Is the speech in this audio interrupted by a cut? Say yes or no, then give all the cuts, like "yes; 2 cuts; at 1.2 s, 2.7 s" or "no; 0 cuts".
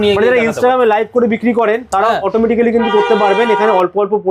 no; 0 cuts